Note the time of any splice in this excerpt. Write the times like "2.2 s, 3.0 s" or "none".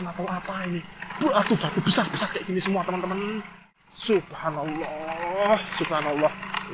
3.7 s